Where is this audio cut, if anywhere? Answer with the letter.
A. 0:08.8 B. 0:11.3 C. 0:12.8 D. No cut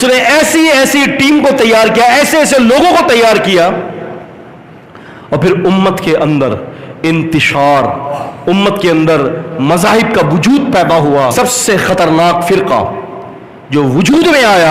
B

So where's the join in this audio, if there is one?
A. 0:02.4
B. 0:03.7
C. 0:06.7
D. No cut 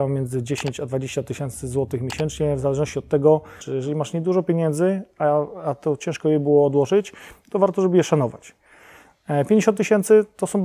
B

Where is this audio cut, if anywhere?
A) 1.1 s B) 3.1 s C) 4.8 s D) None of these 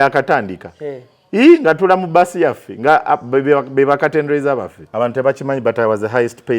C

